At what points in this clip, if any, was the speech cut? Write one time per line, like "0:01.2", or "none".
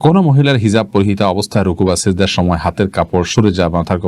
none

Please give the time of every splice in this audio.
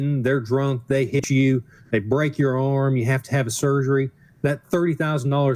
0:01.2

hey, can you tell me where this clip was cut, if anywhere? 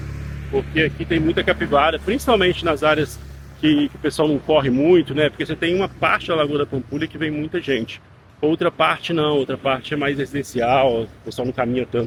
none

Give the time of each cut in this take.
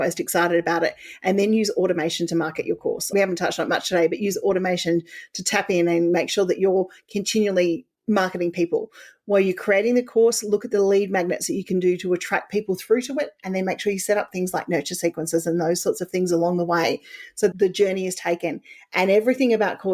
0:17.5

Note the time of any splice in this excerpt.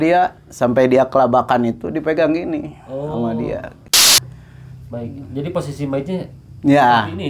0:04.0

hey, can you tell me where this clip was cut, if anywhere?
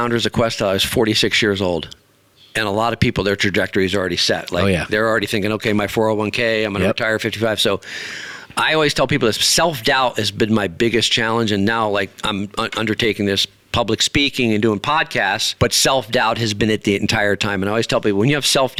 none

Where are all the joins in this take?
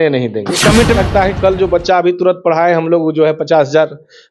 0:01.0

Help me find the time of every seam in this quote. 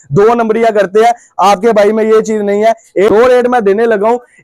0:03.1

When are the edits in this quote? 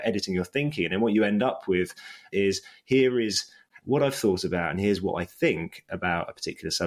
0:02.3

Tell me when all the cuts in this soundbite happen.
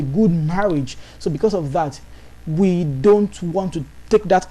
none

